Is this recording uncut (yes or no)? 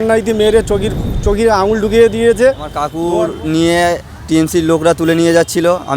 no